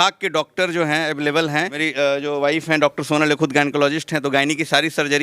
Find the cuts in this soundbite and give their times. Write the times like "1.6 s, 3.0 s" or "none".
1.8 s